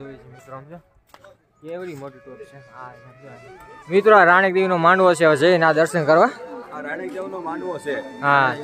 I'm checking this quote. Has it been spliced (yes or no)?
yes